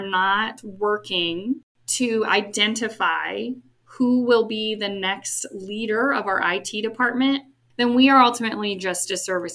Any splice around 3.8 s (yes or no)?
yes